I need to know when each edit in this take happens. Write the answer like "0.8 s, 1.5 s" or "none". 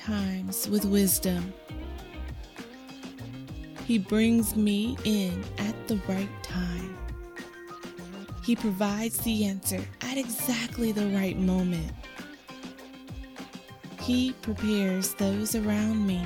none